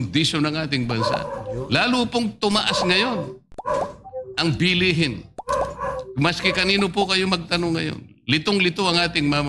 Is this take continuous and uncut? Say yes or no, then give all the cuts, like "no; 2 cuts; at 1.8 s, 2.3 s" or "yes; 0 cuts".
yes; 0 cuts